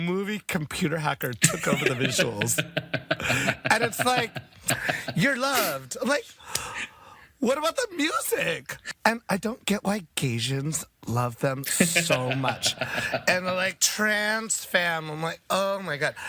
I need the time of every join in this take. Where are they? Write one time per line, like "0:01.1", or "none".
0:08.8

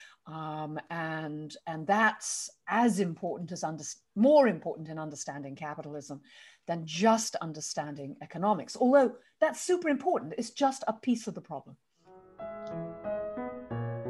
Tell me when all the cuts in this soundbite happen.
none

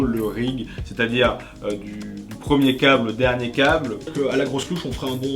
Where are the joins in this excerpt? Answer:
0:04.1

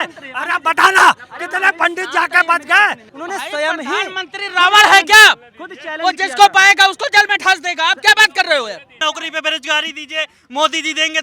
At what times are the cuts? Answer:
0:03.1
0:09.0

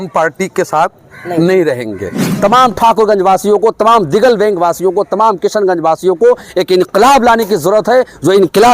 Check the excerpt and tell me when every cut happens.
0:02.2

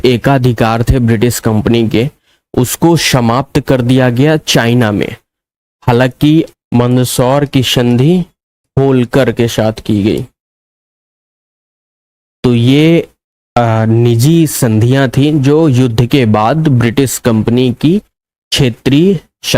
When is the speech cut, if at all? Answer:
0:06.5

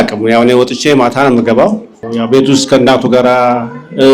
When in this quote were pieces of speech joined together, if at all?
0:02.0

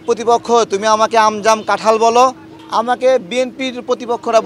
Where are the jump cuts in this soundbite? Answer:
0:02.5

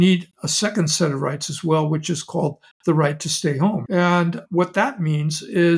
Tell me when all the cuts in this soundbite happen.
0:03.8

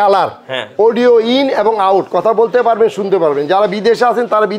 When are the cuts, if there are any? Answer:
none

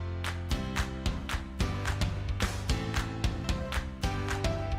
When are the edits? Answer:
0:03.4

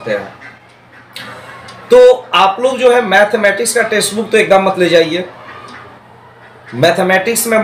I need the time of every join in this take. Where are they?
none

